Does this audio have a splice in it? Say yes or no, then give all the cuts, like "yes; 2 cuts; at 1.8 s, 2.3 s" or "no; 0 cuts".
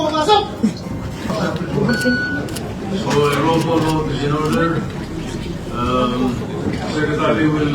yes; 1 cut; at 1.3 s